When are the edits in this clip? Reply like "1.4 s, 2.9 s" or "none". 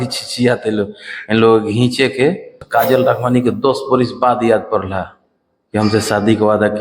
2.5 s